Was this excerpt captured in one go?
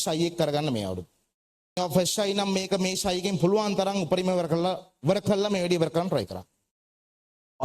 no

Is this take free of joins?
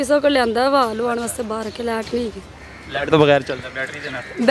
yes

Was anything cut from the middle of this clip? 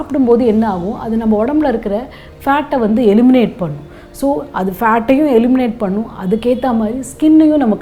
no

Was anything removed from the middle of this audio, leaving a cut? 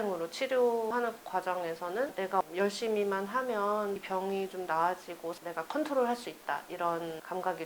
yes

